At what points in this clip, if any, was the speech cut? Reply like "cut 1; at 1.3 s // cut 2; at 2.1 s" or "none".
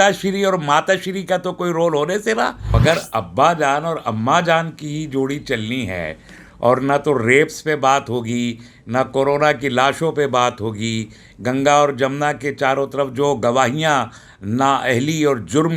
cut 1; at 2.8 s